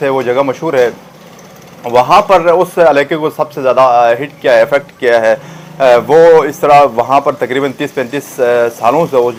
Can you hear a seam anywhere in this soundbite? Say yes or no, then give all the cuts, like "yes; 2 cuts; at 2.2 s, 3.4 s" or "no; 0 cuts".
no; 0 cuts